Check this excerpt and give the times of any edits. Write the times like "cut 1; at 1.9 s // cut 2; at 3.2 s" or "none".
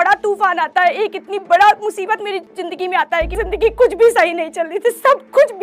cut 1; at 3.4 s